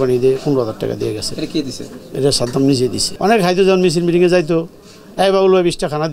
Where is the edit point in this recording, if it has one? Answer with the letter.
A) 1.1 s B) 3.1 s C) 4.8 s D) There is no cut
B